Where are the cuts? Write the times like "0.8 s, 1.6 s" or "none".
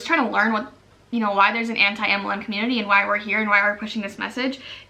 none